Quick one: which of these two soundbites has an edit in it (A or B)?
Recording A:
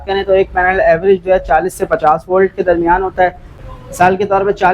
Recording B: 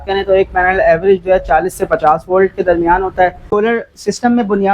B